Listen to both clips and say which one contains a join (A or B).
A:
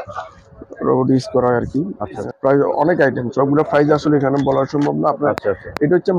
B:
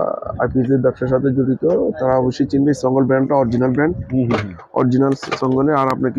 A